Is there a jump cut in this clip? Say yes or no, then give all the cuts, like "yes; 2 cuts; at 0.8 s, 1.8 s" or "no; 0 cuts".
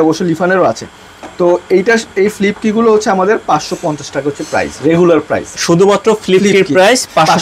no; 0 cuts